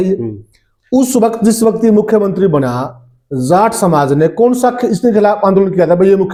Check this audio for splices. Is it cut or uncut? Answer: uncut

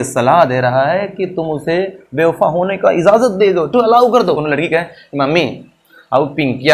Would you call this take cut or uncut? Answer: cut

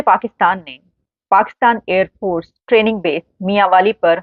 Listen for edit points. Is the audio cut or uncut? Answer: uncut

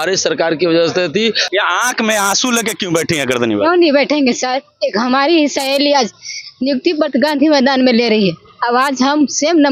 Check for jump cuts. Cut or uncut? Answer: cut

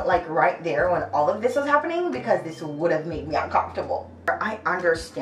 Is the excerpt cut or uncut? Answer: cut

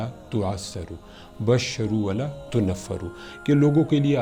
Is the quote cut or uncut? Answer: uncut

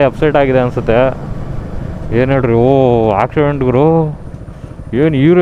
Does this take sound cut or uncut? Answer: uncut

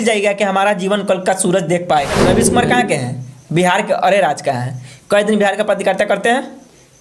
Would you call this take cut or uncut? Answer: cut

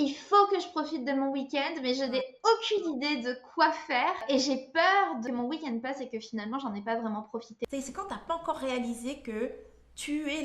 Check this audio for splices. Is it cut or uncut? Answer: cut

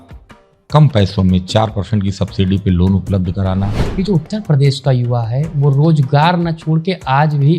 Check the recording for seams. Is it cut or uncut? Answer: cut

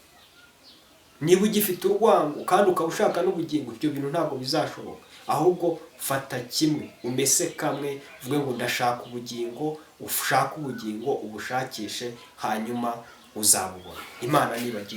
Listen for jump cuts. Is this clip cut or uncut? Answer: uncut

